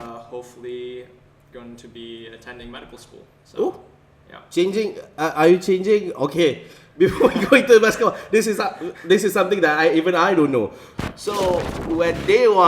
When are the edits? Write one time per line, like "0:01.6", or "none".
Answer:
0:10.9